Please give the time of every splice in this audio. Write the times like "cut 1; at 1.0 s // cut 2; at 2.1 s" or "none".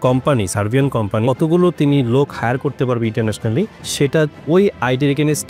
cut 1; at 1.2 s // cut 2; at 3.8 s